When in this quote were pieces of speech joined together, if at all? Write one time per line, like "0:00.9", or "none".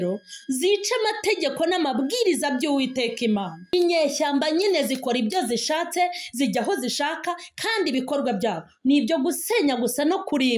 0:03.7